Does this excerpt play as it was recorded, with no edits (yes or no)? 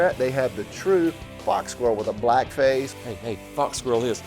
no